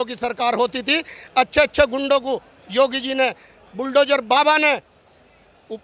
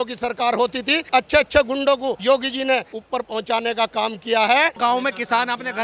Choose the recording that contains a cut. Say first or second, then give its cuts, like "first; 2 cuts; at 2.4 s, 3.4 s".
second; 4 cuts; at 1.0 s, 2.2 s, 3.0 s, 4.8 s